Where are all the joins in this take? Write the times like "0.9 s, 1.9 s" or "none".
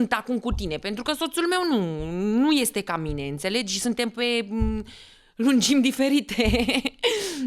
none